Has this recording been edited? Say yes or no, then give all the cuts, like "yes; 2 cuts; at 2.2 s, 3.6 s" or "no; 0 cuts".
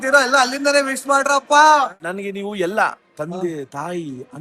yes; 1 cut; at 2.0 s